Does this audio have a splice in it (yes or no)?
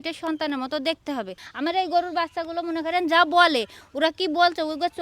yes